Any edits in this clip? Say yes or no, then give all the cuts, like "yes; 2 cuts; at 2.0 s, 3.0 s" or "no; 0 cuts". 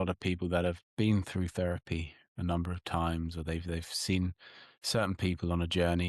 no; 0 cuts